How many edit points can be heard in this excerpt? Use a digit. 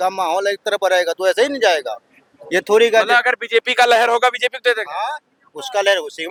0